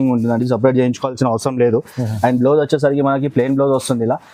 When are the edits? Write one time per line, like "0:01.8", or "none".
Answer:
none